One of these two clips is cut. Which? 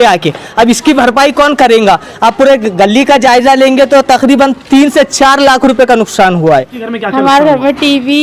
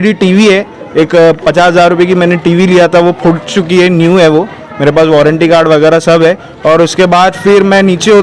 first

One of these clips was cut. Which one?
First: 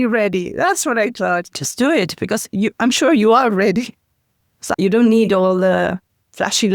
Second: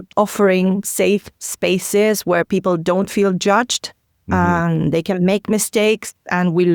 first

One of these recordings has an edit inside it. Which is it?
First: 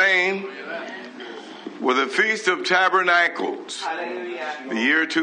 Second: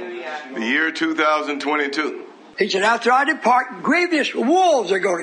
second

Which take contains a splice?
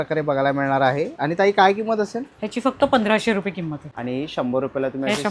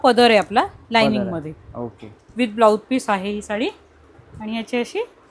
first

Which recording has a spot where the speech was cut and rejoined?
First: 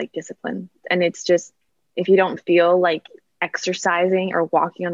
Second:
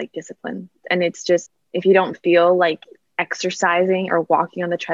second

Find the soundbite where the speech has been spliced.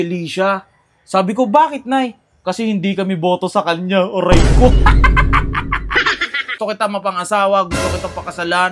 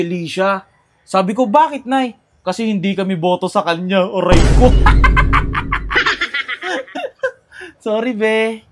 first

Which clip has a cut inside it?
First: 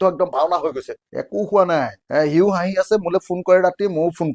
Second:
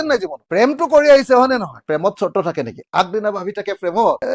second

